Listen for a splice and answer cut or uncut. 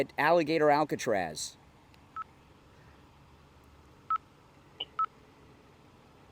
uncut